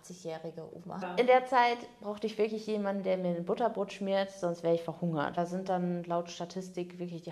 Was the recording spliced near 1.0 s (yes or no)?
yes